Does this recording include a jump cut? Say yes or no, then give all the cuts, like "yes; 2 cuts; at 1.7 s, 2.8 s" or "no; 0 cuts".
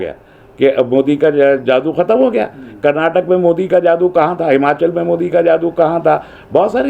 no; 0 cuts